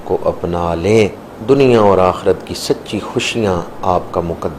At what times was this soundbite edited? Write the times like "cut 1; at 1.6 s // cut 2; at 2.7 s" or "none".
cut 1; at 1.3 s

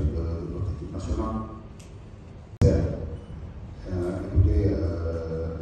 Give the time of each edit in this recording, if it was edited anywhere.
cut 1; at 2.6 s

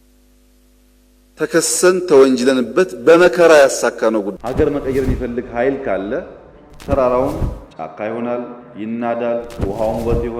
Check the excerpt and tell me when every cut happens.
cut 1; at 4.3 s

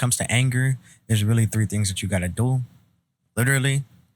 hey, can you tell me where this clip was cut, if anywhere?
none

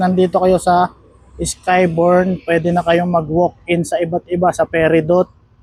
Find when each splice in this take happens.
none

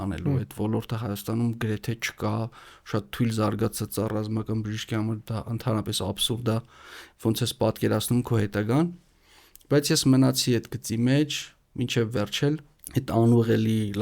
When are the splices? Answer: cut 1; at 12.7 s

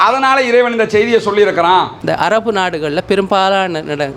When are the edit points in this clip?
cut 1; at 2.0 s

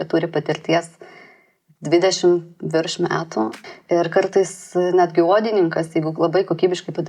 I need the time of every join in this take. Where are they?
cut 1; at 3.6 s

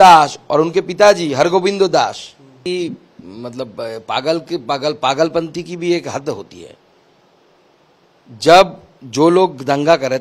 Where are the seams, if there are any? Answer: cut 1; at 2.6 s

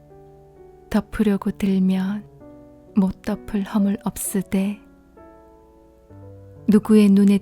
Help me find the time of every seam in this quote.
cut 1; at 5.1 s // cut 2; at 6.6 s

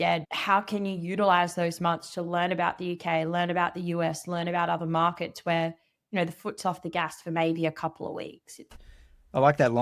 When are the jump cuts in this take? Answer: cut 1; at 8.7 s

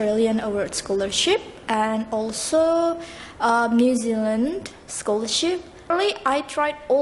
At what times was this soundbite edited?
cut 1; at 5.9 s

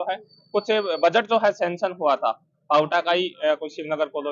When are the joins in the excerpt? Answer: none

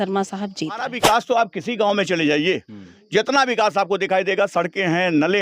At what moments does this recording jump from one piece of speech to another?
cut 1; at 0.9 s

